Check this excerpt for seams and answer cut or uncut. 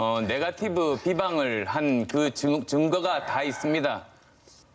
cut